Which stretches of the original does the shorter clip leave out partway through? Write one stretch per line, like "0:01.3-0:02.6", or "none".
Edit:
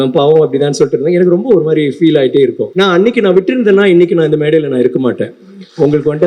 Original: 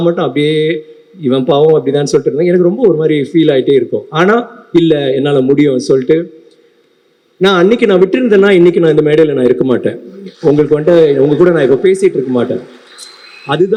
0:04.0-0:07.3